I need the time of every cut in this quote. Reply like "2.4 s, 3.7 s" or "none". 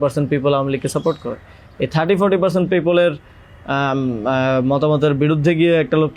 none